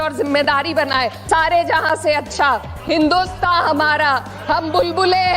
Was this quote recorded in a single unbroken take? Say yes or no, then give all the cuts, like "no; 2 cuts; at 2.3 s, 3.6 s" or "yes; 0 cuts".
no; 1 cut; at 1.3 s